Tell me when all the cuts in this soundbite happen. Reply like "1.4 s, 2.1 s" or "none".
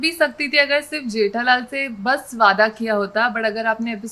none